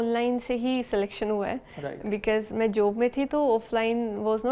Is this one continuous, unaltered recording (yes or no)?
yes